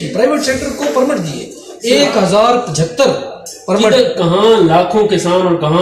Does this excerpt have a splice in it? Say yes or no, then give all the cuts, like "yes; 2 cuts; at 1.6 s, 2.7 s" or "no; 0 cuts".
no; 0 cuts